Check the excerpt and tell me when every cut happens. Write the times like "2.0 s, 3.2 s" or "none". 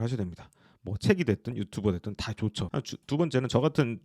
2.6 s